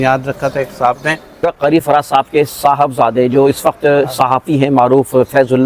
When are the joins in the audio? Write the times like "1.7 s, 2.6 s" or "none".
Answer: 1.5 s